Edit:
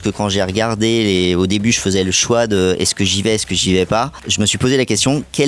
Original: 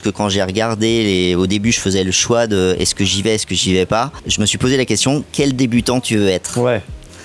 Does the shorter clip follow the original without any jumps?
yes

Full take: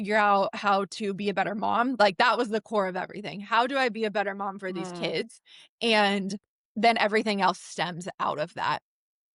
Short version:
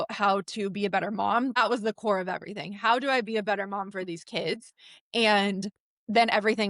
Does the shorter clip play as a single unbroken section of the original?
no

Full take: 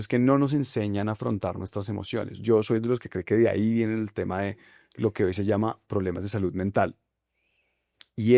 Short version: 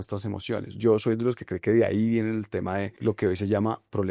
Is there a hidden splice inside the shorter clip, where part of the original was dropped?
yes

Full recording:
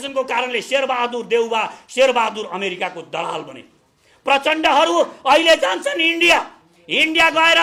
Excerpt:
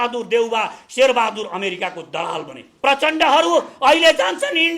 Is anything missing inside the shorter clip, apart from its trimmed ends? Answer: yes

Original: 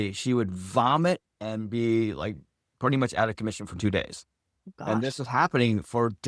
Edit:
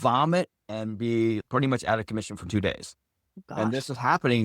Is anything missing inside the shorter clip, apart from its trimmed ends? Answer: yes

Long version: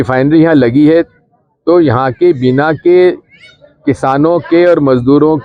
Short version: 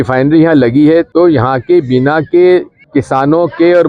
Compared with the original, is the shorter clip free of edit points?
no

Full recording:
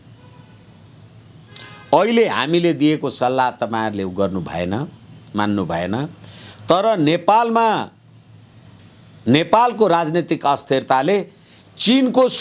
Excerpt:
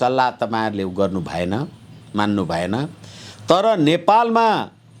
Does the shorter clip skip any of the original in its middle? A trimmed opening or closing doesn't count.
no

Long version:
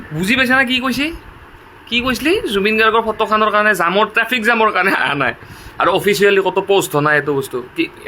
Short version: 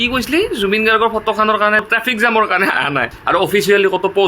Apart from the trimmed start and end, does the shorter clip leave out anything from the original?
yes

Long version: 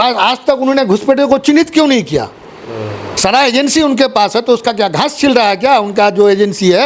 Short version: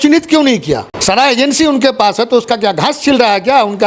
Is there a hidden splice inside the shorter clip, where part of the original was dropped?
yes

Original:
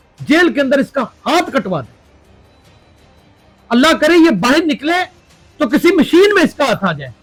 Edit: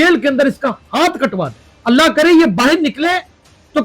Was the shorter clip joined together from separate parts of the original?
yes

